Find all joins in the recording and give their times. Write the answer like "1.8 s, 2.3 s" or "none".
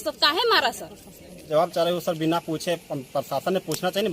1.5 s